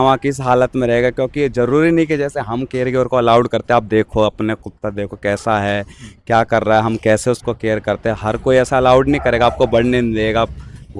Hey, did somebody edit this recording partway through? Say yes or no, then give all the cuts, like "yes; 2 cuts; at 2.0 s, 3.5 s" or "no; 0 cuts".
no; 0 cuts